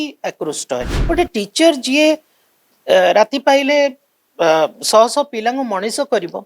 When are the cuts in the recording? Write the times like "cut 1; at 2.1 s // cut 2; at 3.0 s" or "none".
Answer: cut 1; at 0.9 s